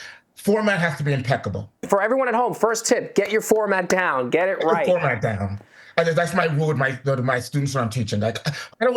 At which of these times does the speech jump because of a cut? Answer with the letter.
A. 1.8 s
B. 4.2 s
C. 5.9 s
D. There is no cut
A